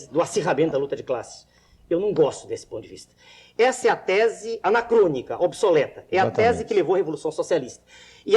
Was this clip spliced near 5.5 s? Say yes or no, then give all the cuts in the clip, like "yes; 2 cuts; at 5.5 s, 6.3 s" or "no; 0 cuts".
yes; 1 cut; at 5.5 s